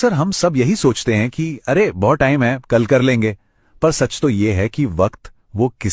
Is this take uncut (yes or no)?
yes